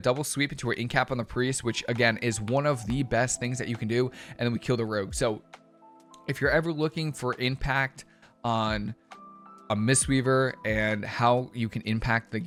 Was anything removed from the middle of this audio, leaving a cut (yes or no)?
no